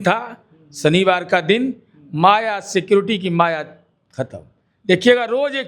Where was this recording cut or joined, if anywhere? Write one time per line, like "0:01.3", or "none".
none